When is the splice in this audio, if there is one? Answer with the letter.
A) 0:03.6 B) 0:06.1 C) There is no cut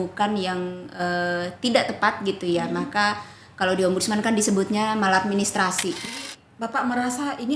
B